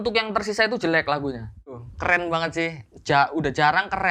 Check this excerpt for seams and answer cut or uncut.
cut